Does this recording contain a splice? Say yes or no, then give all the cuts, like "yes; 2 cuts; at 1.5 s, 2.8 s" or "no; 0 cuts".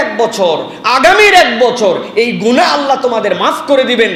no; 0 cuts